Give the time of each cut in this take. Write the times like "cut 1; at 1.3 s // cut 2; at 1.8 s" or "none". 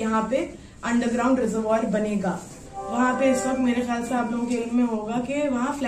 none